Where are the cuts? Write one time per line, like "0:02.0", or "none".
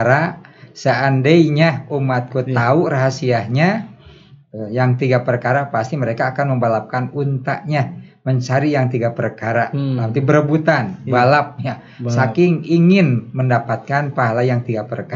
none